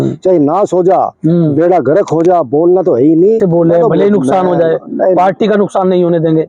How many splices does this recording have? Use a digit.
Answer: 1